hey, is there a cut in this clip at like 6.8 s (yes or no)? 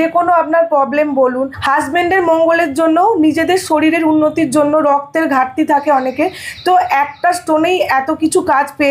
no